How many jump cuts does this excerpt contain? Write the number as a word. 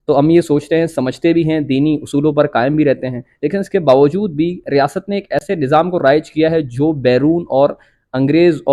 zero